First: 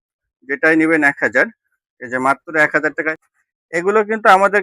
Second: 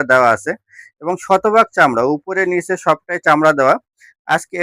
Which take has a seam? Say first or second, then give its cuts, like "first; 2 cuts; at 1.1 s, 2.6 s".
first; 1 cut; at 3.1 s